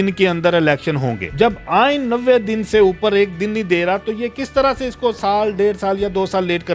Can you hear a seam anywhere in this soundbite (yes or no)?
no